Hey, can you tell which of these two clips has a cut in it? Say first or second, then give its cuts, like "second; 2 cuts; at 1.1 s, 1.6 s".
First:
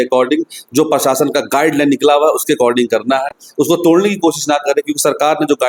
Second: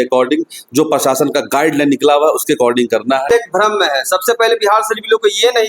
second; 1 cut; at 3.3 s